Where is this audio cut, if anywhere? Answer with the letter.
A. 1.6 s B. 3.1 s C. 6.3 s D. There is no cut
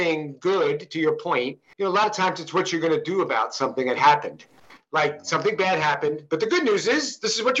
A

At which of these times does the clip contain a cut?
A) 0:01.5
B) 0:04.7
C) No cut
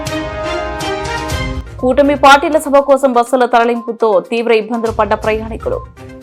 A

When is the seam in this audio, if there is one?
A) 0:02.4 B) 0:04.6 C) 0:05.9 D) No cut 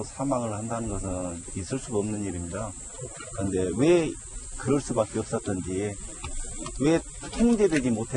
D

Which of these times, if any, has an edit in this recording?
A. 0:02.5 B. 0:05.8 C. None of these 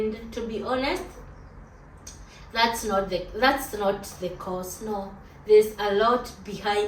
C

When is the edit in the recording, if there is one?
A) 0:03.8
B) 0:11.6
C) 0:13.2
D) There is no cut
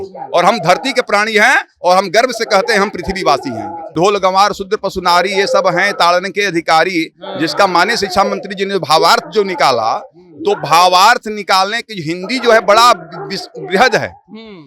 A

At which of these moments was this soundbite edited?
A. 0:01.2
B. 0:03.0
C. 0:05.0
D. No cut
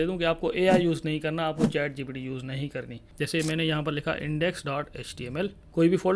B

